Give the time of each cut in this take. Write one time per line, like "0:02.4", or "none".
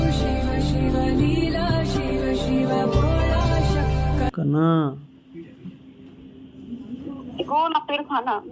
0:04.3